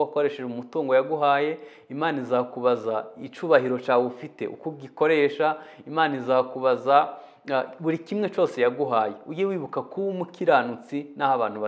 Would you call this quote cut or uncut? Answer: uncut